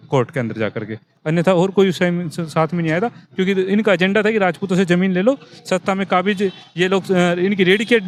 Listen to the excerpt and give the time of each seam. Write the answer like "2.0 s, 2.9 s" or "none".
none